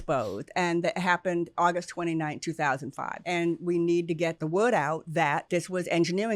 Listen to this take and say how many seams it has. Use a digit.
3